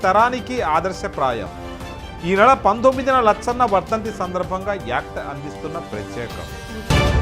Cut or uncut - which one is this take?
uncut